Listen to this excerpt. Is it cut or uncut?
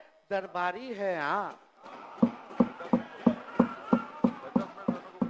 uncut